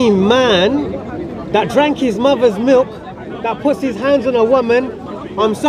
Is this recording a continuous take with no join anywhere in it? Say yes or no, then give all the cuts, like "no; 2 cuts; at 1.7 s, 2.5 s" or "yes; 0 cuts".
yes; 0 cuts